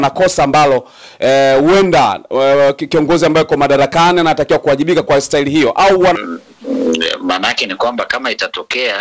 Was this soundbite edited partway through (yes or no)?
yes